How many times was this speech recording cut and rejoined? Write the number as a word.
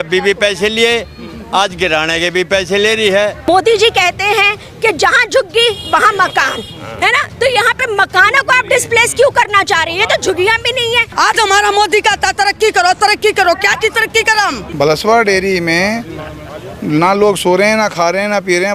three